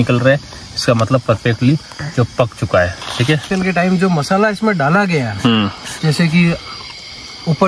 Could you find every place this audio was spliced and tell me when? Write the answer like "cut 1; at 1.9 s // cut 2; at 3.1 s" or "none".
cut 1; at 3.5 s